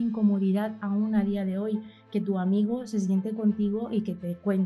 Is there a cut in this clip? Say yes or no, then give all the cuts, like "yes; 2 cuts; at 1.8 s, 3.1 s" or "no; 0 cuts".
no; 0 cuts